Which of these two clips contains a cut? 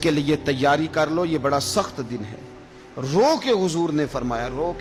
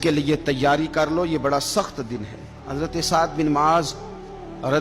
second; 1 cut; at 2.6 s

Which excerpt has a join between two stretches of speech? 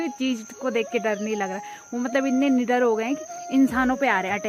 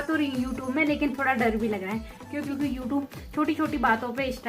second; 1 cut; at 2.5 s

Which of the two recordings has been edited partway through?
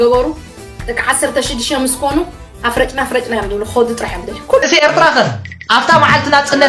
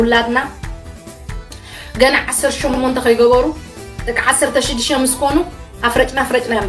first; 1 cut; at 4.6 s

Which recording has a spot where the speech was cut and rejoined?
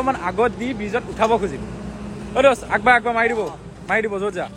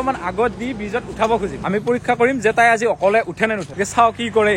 second; 2 cuts; at 1.6 s, 3.7 s

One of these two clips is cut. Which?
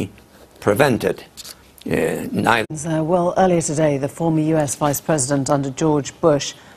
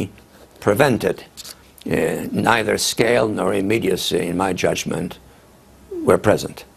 second; 1 cut; at 2.7 s

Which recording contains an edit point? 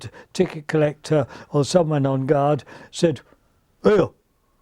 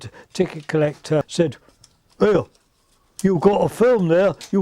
second; 1 cut; at 1.3 s

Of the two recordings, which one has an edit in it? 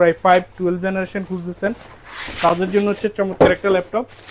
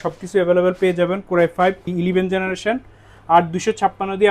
second; 1 cut; at 1.8 s

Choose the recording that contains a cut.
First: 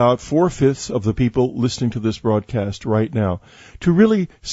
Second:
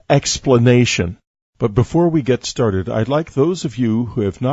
second; 1 cut; at 2.7 s

